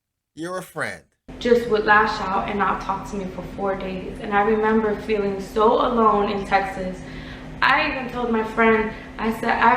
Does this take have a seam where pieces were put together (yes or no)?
yes